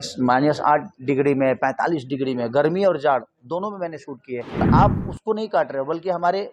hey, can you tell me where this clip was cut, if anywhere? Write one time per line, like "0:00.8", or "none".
0:04.6